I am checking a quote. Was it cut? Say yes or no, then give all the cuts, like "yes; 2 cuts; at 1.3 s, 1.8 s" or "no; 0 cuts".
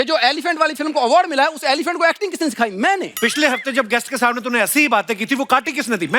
yes; 1 cut; at 3.1 s